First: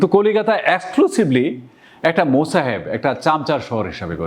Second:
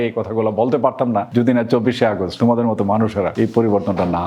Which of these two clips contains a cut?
second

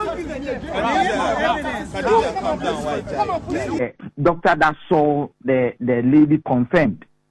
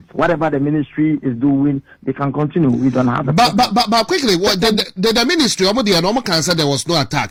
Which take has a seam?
first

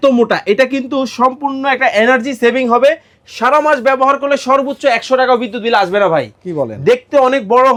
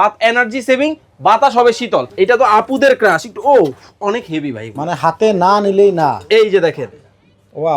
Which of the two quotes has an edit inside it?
second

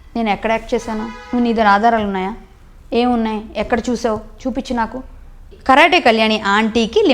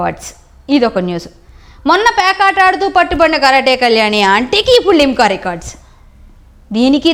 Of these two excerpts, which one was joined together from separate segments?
first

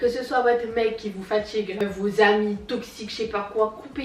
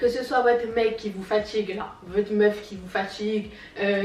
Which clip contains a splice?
first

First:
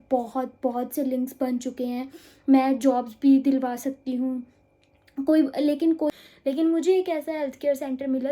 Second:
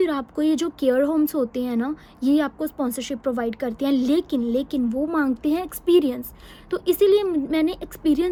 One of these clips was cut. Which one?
first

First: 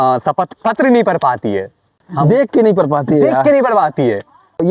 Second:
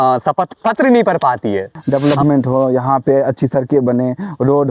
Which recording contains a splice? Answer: second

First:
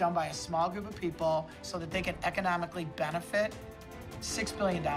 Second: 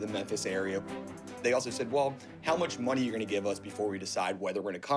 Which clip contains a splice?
second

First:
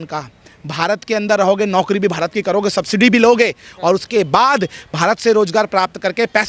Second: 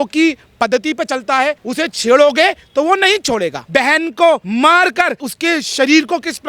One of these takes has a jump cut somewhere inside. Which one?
second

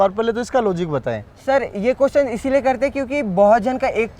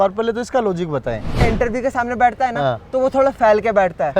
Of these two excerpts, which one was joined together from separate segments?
second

